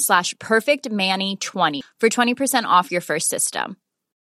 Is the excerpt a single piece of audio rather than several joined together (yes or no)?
no